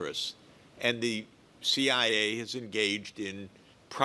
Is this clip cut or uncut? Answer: uncut